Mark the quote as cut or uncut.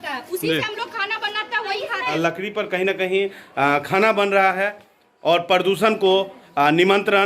cut